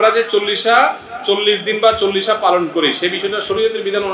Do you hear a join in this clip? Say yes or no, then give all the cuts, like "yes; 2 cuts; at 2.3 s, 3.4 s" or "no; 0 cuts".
no; 0 cuts